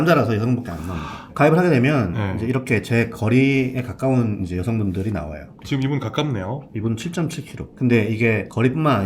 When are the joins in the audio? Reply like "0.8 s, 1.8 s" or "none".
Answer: none